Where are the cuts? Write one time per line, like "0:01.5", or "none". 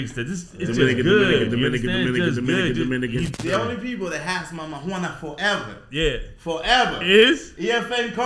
0:03.4